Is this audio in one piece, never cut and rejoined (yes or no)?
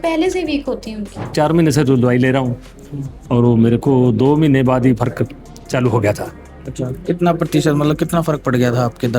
no